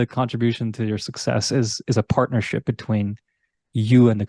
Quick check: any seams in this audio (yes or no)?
no